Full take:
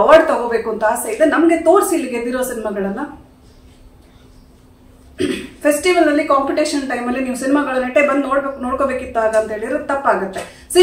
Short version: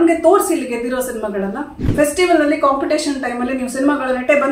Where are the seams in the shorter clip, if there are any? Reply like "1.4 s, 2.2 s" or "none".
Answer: 1.8 s